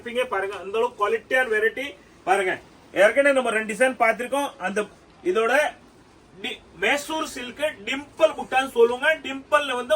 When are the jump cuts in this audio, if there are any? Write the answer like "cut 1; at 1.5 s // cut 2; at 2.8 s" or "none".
none